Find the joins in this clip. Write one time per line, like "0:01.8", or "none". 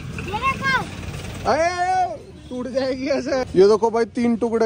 0:03.5